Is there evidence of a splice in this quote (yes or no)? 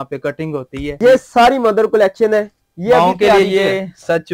yes